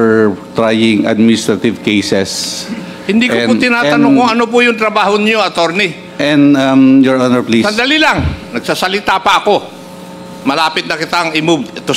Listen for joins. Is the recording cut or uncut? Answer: uncut